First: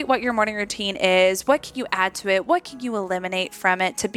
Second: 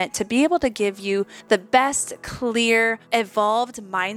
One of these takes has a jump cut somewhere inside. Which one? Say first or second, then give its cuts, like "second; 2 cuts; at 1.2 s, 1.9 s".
second; 2 cuts; at 1.4 s, 3.0 s